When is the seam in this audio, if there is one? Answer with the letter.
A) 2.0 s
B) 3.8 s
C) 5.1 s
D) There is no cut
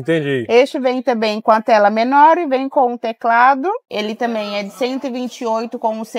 B